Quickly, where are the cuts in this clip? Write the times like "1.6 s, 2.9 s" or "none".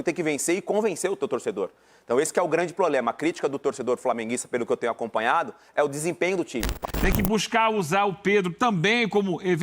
6.6 s